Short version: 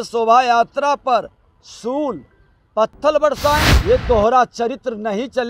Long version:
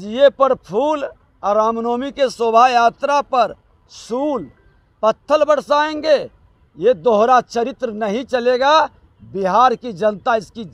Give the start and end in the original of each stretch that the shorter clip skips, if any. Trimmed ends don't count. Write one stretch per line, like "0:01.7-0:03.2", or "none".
0:06.0-0:06.7